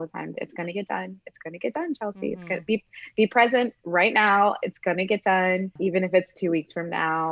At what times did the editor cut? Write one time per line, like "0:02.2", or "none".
0:05.7